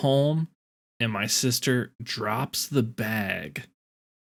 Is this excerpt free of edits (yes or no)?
yes